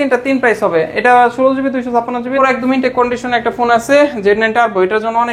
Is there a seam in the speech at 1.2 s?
no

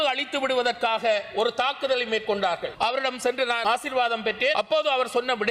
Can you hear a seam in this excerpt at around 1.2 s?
no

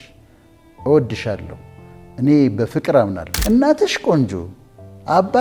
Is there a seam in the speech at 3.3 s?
yes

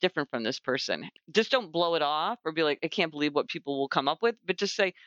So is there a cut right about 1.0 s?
yes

